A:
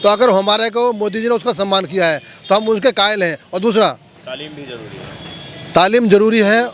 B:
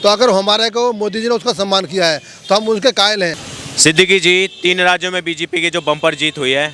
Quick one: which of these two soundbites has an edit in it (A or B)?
B